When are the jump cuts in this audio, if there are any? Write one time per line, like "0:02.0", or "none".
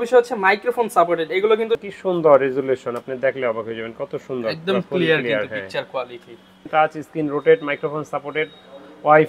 0:01.8
0:06.5